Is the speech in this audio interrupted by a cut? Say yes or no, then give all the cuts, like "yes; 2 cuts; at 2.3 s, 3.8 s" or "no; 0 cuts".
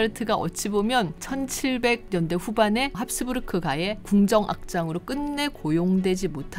no; 0 cuts